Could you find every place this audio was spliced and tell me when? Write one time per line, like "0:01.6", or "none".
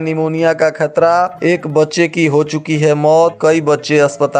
none